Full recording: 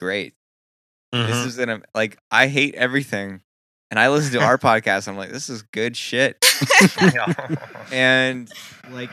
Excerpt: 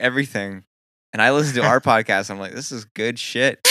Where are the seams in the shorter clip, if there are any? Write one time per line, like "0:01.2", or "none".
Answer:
none